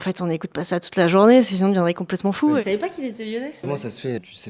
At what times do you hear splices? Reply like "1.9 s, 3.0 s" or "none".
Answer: 2.6 s